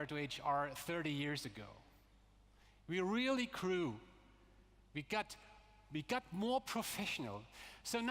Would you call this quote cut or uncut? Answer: cut